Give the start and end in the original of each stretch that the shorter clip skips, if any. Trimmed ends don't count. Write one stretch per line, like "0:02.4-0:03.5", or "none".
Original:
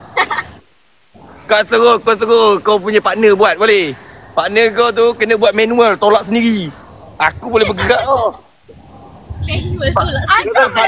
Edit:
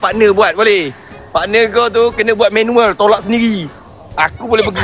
none